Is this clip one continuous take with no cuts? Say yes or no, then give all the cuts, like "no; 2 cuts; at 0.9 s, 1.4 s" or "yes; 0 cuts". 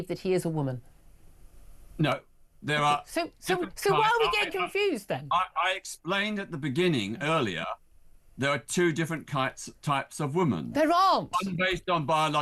yes; 0 cuts